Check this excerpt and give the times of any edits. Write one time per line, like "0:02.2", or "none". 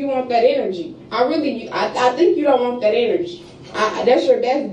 none